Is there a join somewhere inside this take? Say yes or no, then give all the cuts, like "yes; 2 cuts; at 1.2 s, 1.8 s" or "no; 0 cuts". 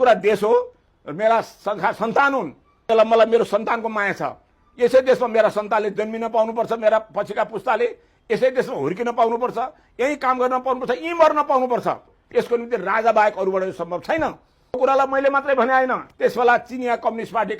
yes; 2 cuts; at 12.1 s, 14.8 s